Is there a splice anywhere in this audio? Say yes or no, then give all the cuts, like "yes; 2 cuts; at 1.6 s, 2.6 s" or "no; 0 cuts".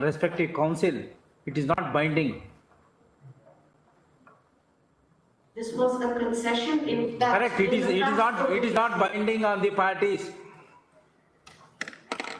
no; 0 cuts